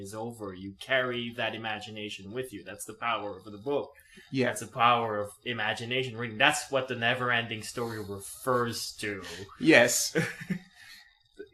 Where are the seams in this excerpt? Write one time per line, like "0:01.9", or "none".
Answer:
0:08.5